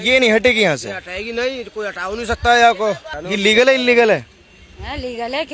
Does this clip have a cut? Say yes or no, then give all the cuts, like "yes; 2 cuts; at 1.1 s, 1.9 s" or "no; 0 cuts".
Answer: yes; 1 cut; at 3.1 s